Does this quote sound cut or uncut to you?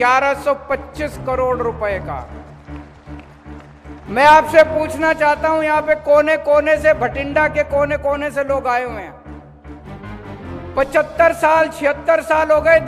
cut